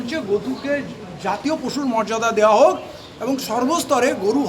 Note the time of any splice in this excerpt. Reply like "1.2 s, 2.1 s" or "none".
none